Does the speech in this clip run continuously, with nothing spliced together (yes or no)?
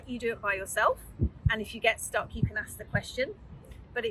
yes